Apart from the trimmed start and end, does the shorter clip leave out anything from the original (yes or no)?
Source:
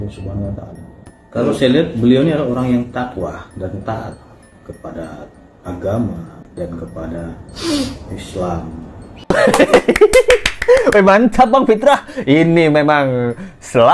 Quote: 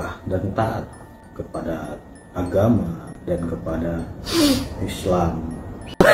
no